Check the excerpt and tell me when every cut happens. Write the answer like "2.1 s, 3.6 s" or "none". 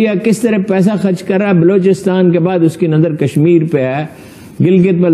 none